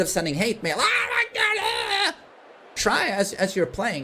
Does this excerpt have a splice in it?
no; 0 cuts

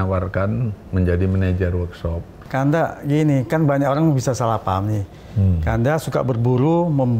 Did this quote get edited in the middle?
yes; 1 cut; at 2.4 s

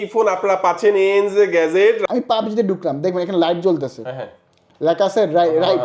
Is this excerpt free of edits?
no; 1 cut; at 2.0 s

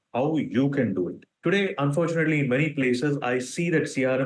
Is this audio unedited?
no; 1 cut; at 1.3 s

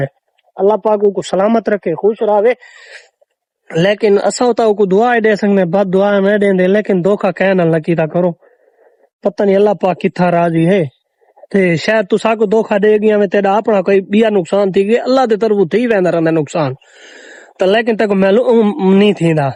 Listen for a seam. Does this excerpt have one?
no; 0 cuts

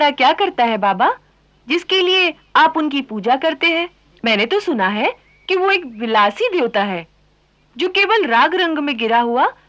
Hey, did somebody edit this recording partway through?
yes; 1 cut; at 4.0 s

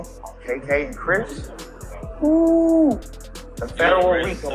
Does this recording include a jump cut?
no; 0 cuts

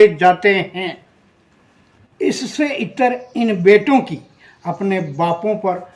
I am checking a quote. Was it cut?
no; 0 cuts

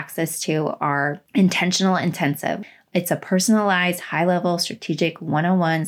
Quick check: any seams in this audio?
yes; 2 cuts; at 1.2 s, 2.6 s

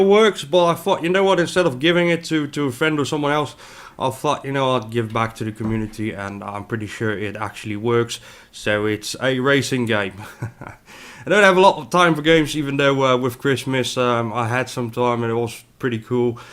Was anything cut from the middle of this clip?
yes; 1 cut; at 2.9 s

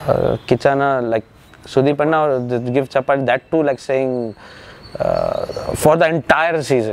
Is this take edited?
no; 0 cuts

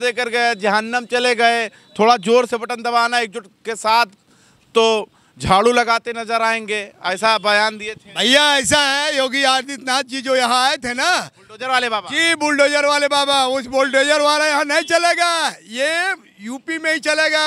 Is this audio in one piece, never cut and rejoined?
yes; 0 cuts

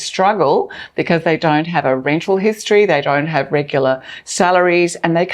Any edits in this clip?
no; 0 cuts

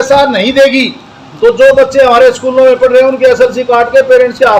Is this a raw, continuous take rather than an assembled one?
yes; 0 cuts

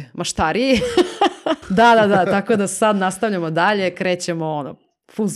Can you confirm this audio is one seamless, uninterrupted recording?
no; 1 cut; at 1.6 s

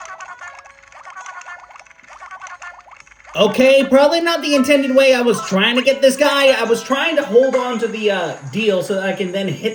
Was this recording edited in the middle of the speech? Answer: no; 0 cuts

